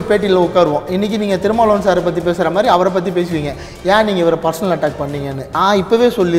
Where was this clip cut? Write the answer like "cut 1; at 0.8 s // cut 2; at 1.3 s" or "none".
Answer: cut 1; at 5.4 s